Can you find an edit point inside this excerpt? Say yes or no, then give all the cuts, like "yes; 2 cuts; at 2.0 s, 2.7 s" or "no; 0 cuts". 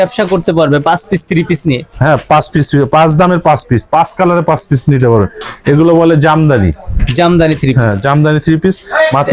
no; 0 cuts